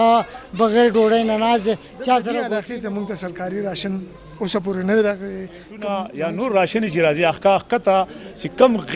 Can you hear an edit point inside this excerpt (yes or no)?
yes